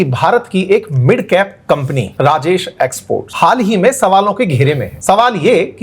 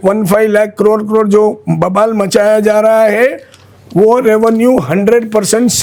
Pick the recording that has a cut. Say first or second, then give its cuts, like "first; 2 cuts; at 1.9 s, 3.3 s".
first; 3 cuts; at 2.1 s, 3.3 s, 4.9 s